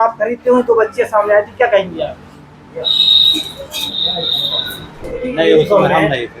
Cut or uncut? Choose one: cut